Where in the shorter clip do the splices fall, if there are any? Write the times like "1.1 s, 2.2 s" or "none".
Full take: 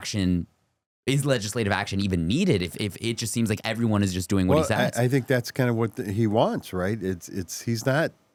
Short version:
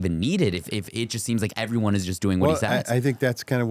none